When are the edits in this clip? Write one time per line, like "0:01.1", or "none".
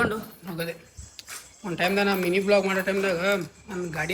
none

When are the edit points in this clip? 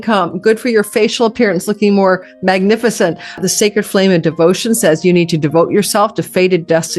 0:03.4

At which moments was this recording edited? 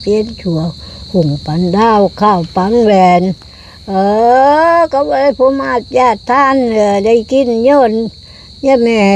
none

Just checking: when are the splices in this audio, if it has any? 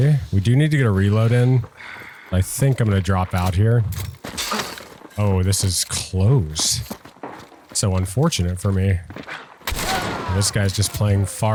none

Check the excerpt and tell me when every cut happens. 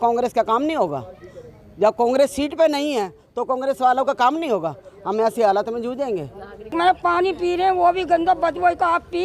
0:06.7

